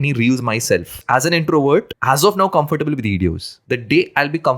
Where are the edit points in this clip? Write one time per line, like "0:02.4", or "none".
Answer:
0:00.9
0:01.9
0:03.5